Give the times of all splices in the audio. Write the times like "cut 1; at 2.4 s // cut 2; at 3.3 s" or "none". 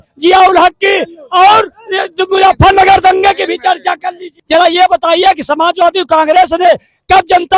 cut 1; at 4.3 s